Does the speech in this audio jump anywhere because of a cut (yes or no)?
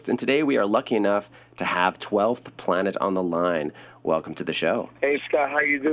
yes